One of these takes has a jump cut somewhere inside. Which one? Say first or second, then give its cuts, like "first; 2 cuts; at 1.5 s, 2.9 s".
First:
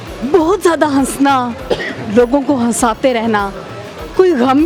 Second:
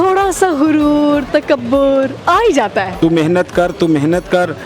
second; 1 cut; at 2.9 s